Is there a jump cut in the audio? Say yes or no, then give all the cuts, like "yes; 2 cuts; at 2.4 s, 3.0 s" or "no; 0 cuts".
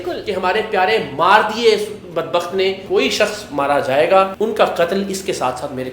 yes; 2 cuts; at 2.8 s, 4.3 s